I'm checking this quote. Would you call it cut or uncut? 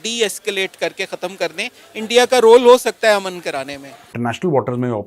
cut